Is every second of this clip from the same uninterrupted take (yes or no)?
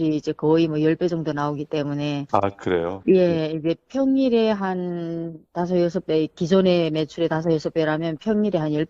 yes